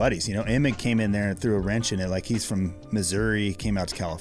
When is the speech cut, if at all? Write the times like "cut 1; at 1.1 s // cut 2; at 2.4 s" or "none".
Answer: none